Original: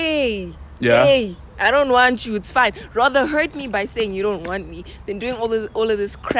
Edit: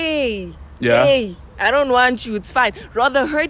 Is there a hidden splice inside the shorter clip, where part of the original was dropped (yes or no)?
no